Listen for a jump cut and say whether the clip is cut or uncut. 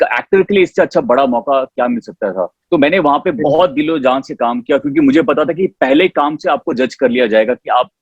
uncut